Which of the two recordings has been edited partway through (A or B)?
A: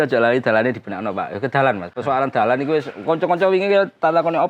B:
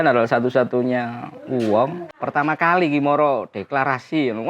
B